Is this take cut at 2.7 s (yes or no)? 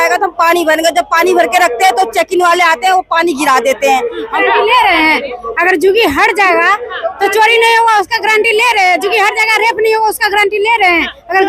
no